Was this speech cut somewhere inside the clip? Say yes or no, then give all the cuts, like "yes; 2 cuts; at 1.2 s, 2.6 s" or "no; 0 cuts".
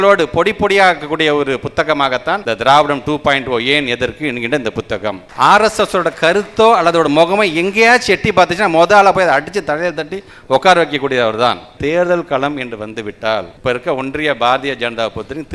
yes; 4 cuts; at 2.4 s, 5.2 s, 11.7 s, 13.5 s